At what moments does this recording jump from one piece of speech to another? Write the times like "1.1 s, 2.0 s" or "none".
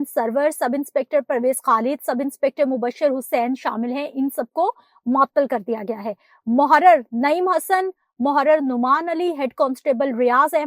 none

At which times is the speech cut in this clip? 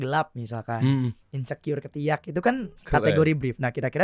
1.3 s, 2.7 s

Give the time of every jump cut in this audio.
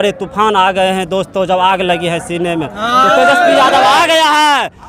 none

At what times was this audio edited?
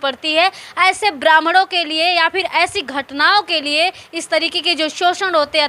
none

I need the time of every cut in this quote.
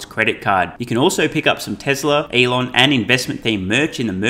2.3 s

